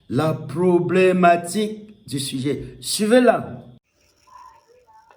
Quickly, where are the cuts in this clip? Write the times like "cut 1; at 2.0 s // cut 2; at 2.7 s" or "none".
none

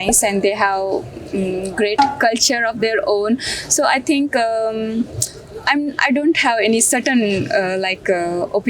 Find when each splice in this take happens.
none

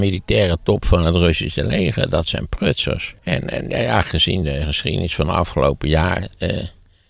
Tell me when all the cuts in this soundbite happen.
cut 1; at 3.0 s

